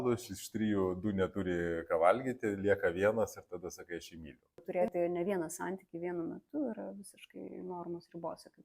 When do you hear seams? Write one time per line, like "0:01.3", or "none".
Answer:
0:04.6